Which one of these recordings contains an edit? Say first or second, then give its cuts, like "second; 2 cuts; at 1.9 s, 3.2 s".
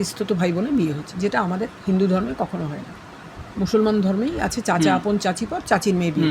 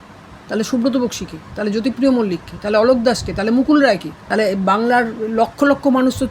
second; 1 cut; at 4.1 s